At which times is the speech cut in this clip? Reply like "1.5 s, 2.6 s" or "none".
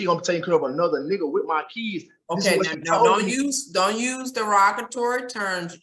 none